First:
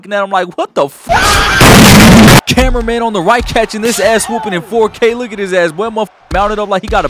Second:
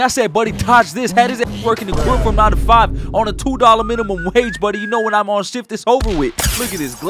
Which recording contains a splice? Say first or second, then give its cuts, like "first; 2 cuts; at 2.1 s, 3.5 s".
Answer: first; 2 cuts; at 1.1 s, 2.5 s